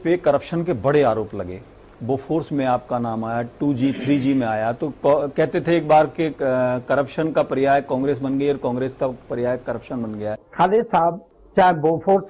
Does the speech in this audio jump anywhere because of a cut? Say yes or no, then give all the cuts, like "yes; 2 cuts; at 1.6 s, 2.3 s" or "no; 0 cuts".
yes; 2 cuts; at 10.4 s, 11.3 s